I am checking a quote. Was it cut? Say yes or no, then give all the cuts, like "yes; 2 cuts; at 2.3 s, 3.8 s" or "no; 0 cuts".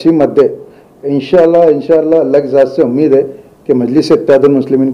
no; 0 cuts